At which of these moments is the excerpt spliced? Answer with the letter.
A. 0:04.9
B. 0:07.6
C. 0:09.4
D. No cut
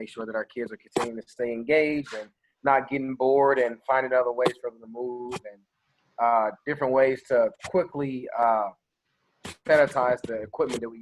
D